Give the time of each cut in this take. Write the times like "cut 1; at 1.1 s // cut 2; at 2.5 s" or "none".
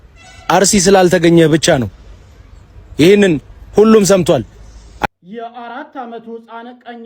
cut 1; at 5.0 s